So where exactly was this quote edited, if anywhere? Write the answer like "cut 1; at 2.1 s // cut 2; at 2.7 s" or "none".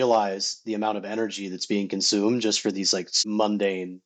cut 1; at 3.2 s